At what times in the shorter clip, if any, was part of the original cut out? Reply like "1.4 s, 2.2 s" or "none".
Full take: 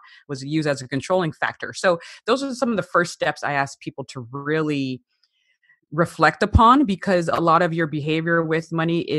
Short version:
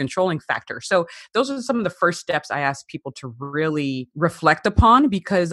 4.1 s